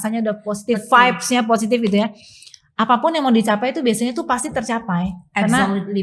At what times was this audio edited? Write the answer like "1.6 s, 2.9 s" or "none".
none